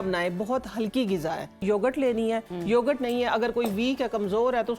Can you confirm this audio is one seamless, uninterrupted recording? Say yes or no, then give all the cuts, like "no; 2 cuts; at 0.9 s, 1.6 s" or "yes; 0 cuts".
no; 1 cut; at 1.6 s